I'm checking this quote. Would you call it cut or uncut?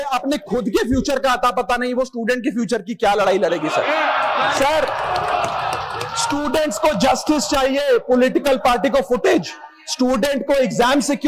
uncut